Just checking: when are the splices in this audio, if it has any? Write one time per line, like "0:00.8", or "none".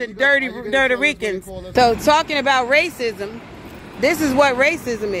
0:01.6